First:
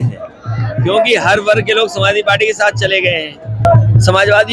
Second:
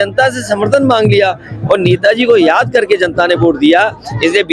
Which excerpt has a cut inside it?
first; 1 cut; at 3.6 s

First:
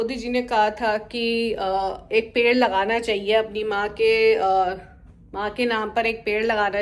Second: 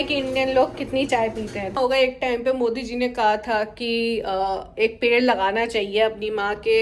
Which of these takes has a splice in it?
second; 1 cut; at 1.8 s

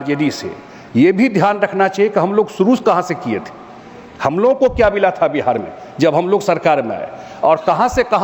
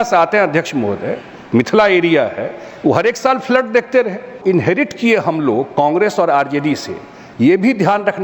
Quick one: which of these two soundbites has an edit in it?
second; 1 cut; at 4.4 s

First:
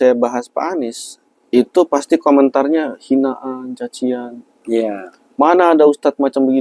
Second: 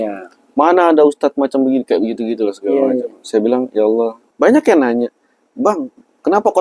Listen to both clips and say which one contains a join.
second; 1 cut; at 4.2 s

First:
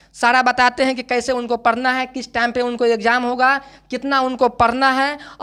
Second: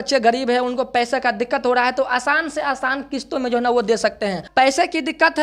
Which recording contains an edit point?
second; 1 cut; at 4.4 s

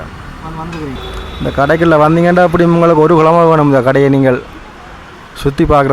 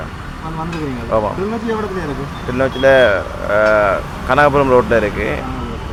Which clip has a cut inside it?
first; 1 cut; at 1.0 s

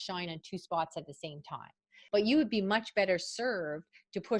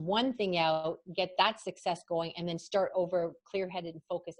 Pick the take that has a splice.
first; 1 cut; at 1.9 s

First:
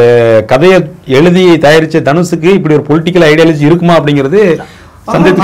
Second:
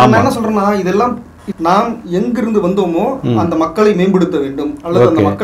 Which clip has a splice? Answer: second; 1 cut; at 1.4 s

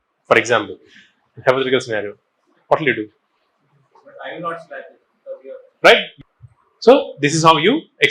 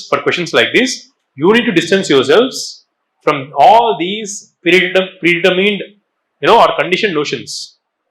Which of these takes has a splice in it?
first; 1 cut; at 6.1 s

